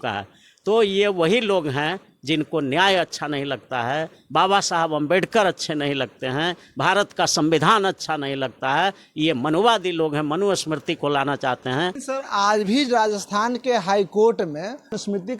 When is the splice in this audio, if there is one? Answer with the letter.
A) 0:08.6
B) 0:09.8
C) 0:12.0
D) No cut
C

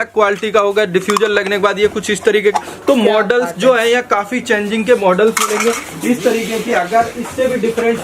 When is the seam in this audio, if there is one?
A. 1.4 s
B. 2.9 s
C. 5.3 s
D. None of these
D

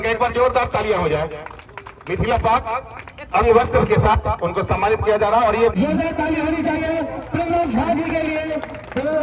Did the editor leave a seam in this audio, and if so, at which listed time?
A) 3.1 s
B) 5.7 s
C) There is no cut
B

